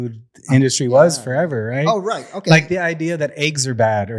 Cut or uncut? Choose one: uncut